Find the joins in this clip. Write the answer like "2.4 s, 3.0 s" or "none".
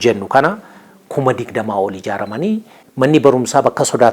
2.8 s